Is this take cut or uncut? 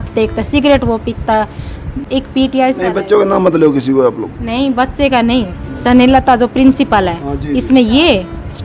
uncut